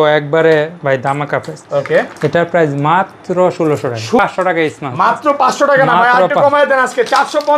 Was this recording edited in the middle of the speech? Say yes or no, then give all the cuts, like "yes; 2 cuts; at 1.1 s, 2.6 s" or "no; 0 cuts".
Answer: yes; 1 cut; at 4.2 s